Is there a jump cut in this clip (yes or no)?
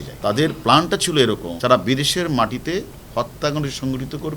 no